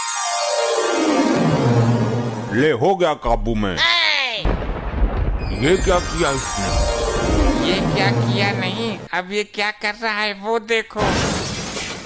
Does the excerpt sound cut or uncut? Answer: cut